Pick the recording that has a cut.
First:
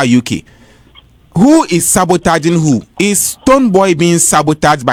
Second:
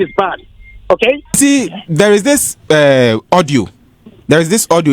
second; 1 cut; at 1.4 s

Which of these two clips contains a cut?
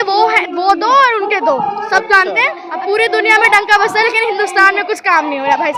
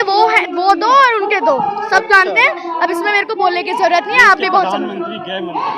first; 1 cut; at 2.6 s

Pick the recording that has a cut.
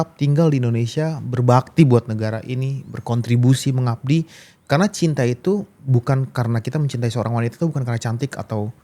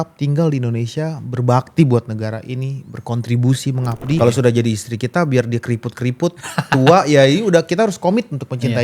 second; 1 cut; at 4.2 s

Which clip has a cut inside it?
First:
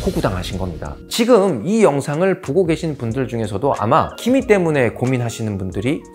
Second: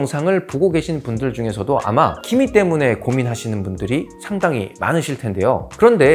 first; 1 cut; at 1.0 s

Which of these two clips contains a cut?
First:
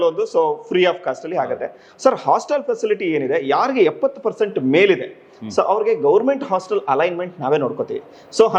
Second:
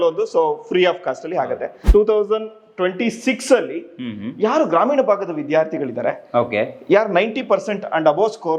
second; 1 cut; at 1.7 s

